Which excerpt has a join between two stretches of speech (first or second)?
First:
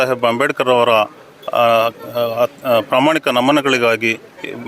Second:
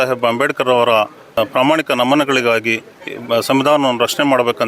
second